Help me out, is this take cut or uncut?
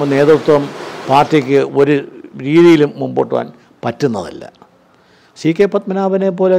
uncut